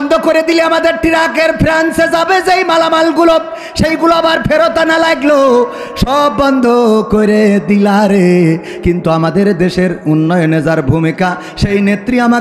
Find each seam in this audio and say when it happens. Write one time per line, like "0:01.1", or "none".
none